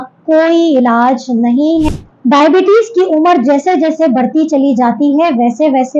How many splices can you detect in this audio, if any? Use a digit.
1